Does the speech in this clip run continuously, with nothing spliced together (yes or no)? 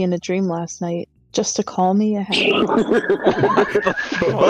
no